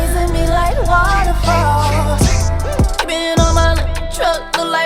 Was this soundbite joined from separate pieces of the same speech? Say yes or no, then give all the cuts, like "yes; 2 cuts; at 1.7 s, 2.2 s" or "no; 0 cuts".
no; 0 cuts